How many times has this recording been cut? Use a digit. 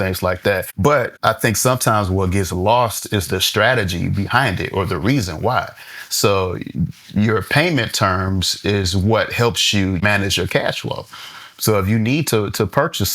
2